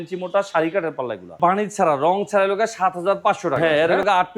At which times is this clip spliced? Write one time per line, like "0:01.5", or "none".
0:01.4
0:03.6